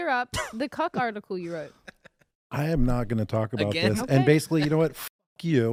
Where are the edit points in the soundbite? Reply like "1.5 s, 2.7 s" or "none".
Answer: none